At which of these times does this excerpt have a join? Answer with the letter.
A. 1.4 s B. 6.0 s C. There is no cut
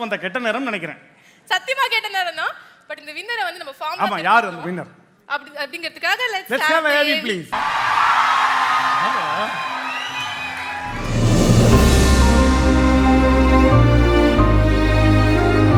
C